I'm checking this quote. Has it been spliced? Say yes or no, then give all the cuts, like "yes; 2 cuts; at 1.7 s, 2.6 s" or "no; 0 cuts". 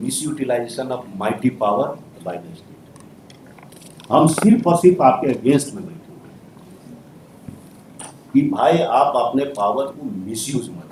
no; 0 cuts